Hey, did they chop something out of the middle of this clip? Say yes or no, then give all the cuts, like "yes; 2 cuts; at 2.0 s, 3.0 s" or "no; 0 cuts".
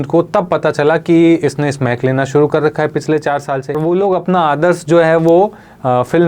yes; 1 cut; at 3.8 s